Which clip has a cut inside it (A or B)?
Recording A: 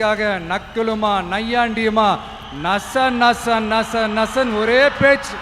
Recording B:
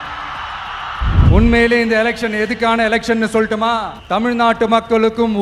B